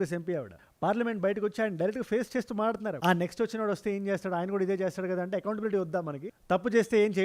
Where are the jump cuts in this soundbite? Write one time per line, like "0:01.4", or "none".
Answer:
0:03.0